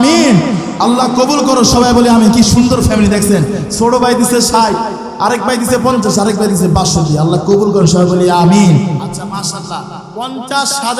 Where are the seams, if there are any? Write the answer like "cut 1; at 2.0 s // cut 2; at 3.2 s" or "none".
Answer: cut 1; at 9.0 s